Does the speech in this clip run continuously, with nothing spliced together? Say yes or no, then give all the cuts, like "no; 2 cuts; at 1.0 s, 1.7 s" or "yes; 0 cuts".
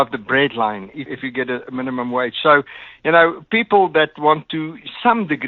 no; 1 cut; at 1.1 s